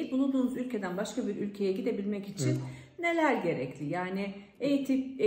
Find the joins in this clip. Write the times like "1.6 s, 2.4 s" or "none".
none